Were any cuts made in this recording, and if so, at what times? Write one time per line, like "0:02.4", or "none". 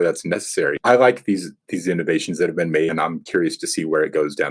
0:00.8
0:02.9